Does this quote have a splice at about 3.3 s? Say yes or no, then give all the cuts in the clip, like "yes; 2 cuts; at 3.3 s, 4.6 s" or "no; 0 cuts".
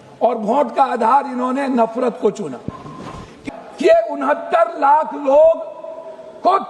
yes; 1 cut; at 3.3 s